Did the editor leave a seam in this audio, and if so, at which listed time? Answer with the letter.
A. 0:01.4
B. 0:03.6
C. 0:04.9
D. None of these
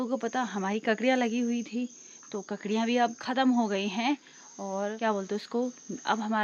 C